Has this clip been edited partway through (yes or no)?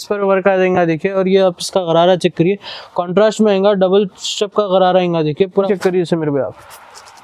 yes